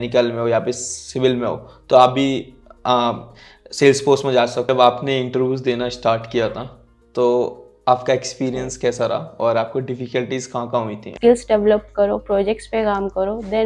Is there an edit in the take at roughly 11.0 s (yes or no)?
yes